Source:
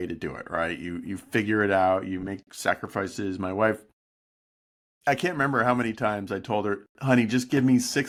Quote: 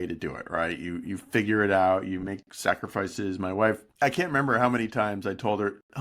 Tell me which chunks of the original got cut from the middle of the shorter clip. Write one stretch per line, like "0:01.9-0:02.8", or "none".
0:03.9-0:04.9